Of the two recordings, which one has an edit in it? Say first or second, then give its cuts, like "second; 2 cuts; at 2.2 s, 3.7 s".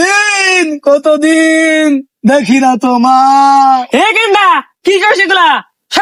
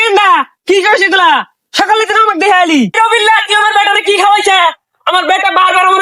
second; 1 cut; at 2.9 s